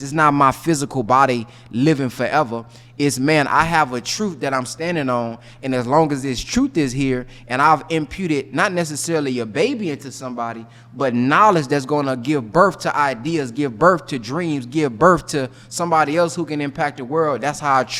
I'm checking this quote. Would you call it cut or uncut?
uncut